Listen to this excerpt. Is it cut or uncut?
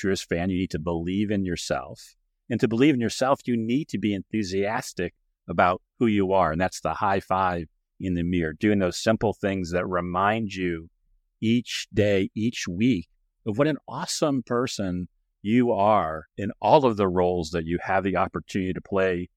uncut